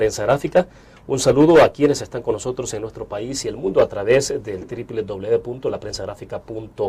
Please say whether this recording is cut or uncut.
cut